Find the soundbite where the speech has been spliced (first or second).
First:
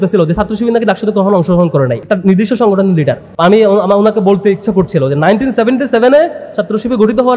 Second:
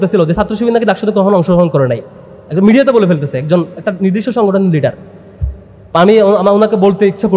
first